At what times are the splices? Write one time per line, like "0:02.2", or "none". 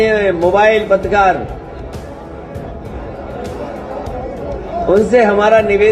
none